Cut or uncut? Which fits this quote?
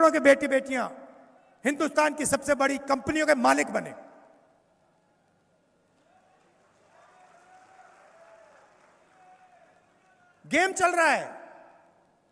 uncut